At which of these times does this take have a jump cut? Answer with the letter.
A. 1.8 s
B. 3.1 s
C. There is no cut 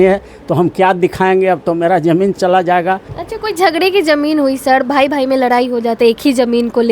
B